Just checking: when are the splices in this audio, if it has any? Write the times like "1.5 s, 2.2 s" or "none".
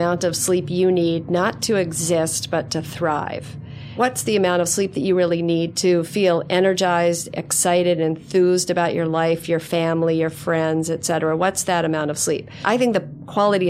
4.0 s, 5.7 s, 12.6 s